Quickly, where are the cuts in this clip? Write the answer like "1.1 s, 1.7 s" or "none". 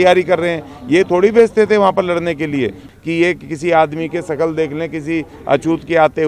2.9 s